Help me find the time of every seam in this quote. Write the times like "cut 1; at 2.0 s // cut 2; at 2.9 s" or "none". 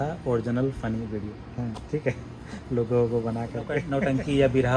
cut 1; at 3.9 s